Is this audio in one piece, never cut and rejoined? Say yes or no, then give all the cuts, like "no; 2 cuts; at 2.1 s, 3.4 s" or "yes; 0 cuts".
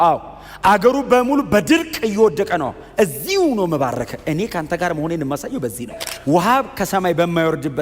no; 1 cut; at 6.1 s